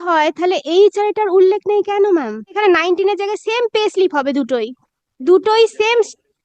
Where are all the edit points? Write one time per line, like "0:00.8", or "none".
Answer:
0:02.5